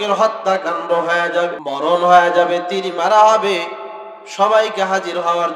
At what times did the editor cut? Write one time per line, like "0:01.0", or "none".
0:01.6